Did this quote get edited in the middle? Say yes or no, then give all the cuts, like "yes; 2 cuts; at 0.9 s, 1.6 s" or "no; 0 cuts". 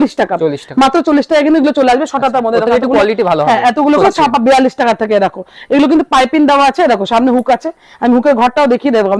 yes; 1 cut; at 4.0 s